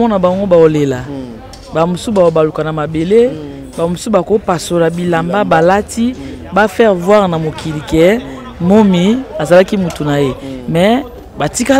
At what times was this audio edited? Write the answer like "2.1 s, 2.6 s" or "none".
none